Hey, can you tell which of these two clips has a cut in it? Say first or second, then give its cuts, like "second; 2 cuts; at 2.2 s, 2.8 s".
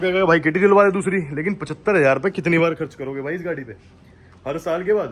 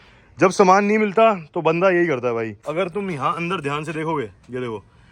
second; 1 cut; at 2.6 s